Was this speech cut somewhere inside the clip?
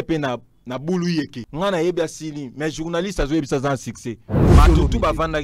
yes; 2 cuts; at 1.4 s, 4.4 s

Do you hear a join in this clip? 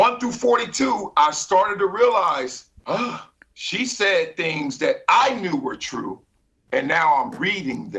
yes; 1 cut; at 2.7 s

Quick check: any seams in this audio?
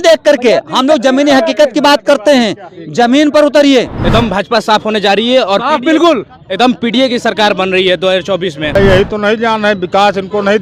yes; 2 cuts; at 3.9 s, 8.7 s

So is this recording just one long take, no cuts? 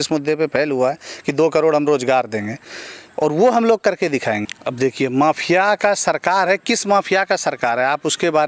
yes; 0 cuts

